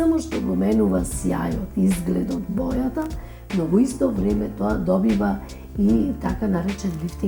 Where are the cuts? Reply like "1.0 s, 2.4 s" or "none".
none